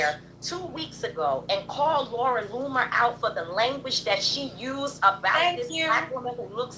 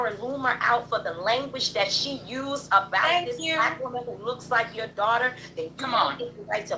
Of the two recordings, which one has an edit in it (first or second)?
second